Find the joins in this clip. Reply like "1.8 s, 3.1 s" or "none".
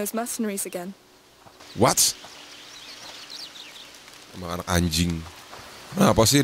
3.2 s